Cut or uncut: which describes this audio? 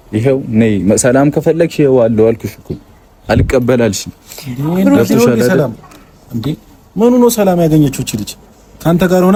uncut